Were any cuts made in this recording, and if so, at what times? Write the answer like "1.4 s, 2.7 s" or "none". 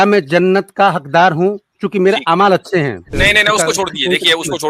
3.0 s